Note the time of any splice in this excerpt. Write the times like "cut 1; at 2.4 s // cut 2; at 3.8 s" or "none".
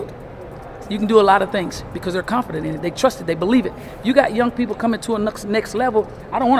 none

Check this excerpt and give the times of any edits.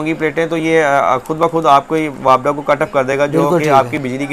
none

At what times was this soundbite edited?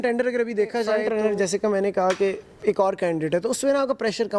cut 1; at 1.0 s

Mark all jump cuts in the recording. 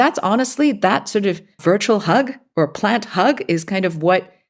cut 1; at 1.6 s

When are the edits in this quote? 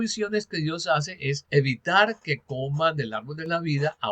cut 1; at 1.4 s

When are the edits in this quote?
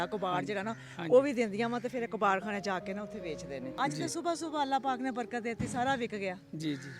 cut 1; at 3.7 s

